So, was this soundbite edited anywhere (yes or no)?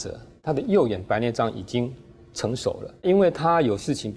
yes